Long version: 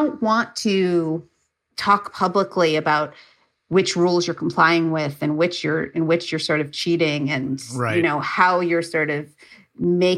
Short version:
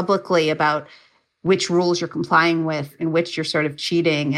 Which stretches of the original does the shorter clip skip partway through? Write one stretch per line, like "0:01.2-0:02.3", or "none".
0:05.2-0:05.9